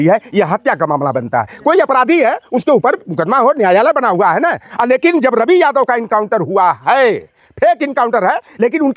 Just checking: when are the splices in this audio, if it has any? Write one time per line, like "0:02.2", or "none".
none